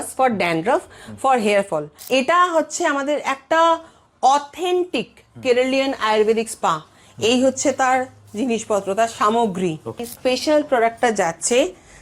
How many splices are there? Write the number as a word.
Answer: two